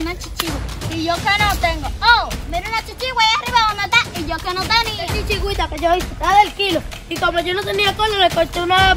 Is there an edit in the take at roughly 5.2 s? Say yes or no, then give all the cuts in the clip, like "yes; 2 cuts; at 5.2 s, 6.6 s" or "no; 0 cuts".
yes; 1 cut; at 5.2 s